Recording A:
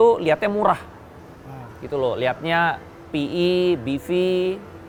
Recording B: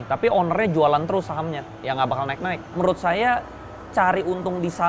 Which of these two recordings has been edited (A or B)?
B